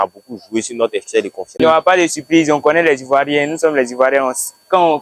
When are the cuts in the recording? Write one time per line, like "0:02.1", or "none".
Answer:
0:01.6